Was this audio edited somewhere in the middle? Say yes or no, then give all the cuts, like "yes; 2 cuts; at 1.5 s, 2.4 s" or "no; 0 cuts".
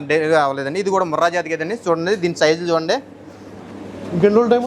no; 0 cuts